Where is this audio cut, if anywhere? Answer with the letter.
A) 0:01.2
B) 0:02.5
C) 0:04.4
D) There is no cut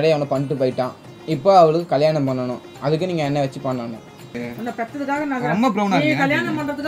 C